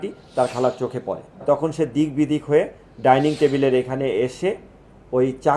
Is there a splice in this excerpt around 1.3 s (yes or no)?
yes